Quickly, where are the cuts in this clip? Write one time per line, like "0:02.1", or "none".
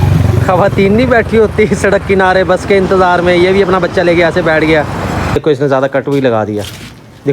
0:05.4